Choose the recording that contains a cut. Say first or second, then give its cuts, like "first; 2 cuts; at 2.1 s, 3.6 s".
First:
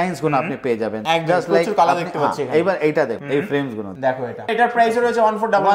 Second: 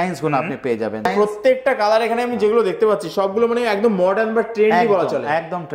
second; 1 cut; at 1.1 s